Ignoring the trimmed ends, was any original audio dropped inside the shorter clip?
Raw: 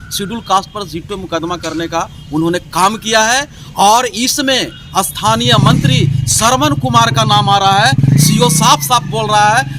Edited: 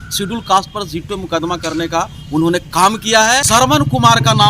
yes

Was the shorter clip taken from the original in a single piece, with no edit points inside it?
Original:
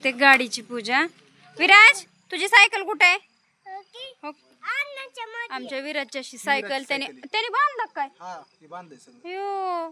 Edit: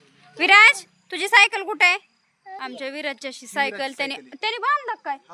no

